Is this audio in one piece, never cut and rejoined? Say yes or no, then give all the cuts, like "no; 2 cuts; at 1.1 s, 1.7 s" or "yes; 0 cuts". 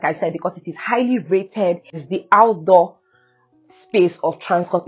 no; 1 cut; at 2.0 s